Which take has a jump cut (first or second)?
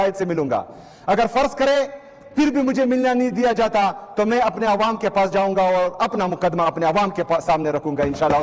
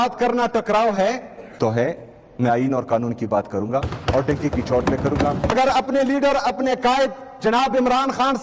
second